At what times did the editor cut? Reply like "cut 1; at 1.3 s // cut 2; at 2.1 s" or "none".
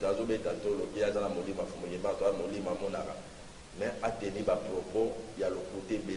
none